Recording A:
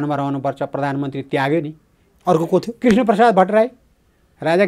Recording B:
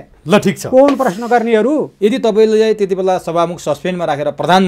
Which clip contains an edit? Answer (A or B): B